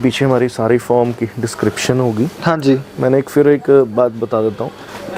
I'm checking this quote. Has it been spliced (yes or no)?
no